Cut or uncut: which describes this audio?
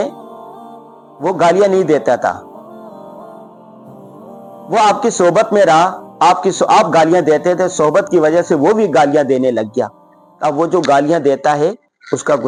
uncut